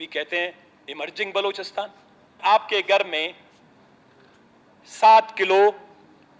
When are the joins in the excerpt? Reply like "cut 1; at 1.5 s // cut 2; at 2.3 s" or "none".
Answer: cut 1; at 2.3 s